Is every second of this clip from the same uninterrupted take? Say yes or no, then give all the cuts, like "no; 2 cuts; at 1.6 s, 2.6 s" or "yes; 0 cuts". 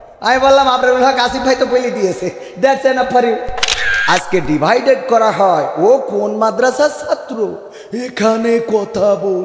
no; 1 cut; at 3.9 s